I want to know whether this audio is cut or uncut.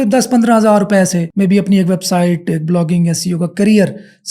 cut